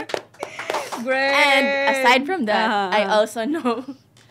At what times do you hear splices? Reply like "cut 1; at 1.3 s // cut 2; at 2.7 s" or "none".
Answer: none